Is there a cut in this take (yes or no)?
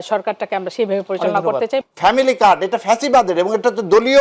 yes